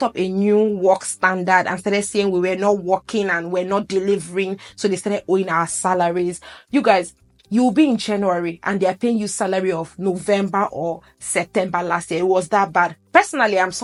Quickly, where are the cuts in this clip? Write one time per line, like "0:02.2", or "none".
none